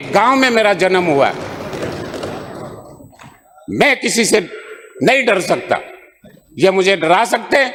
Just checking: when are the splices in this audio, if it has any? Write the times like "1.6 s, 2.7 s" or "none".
none

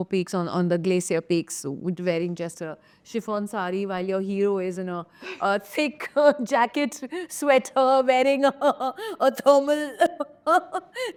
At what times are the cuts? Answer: none

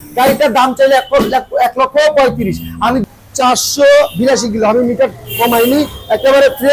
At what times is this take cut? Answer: 3.0 s

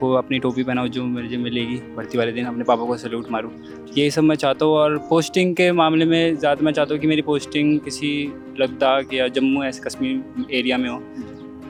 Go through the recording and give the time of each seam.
none

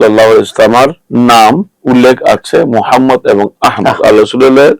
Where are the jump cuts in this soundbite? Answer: 1.0 s, 1.7 s

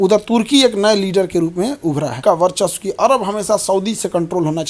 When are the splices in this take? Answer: 2.2 s

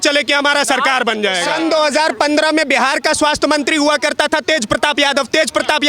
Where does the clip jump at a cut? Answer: 1.5 s

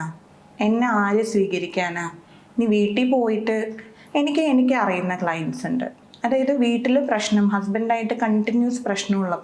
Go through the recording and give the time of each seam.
none

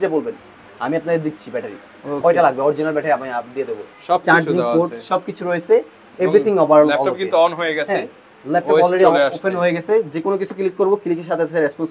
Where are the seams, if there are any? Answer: 3.9 s

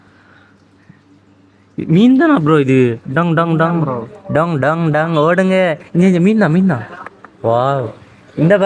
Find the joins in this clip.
none

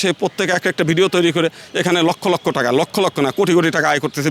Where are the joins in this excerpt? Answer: none

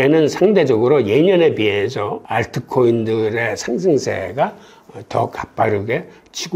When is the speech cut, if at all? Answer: none

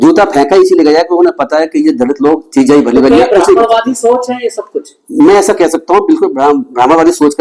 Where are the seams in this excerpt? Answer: none

